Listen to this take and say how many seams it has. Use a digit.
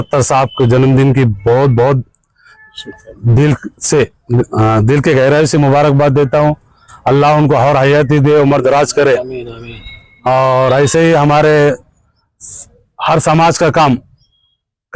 0